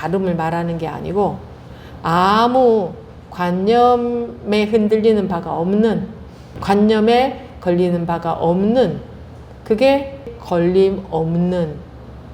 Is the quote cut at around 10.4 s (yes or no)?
yes